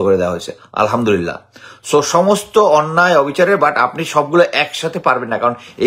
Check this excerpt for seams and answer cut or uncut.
uncut